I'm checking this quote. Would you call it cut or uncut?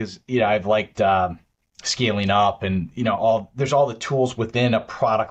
uncut